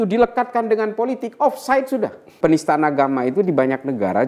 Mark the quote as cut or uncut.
cut